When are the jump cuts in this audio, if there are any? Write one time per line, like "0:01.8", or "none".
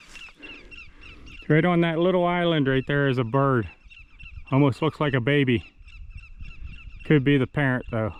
none